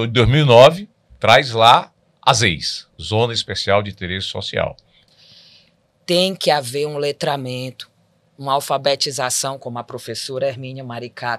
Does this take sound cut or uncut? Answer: cut